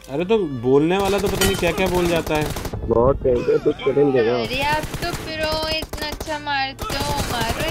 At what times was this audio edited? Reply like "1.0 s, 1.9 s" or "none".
4.5 s